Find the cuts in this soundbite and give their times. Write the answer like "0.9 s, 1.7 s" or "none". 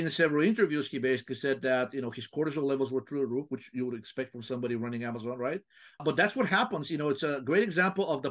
6.0 s